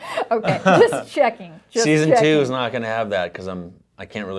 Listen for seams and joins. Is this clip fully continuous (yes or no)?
yes